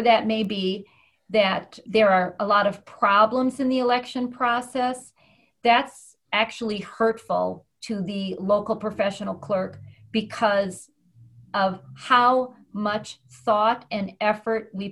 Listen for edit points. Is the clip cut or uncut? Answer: uncut